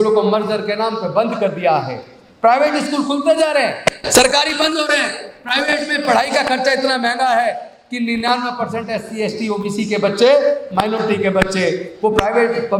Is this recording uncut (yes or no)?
yes